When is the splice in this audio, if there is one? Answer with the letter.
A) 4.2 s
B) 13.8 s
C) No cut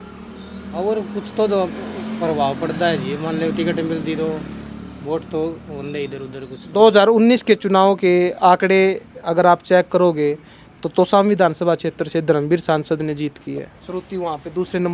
B